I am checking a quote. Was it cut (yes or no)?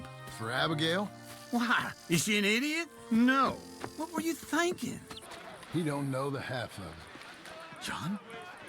yes